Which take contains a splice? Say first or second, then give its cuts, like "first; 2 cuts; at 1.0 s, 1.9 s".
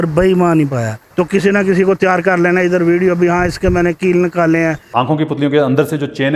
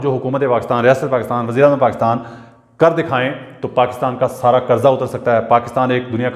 first; 2 cuts; at 1.0 s, 4.9 s